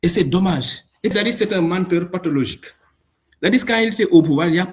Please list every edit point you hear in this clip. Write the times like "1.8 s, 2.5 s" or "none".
1.1 s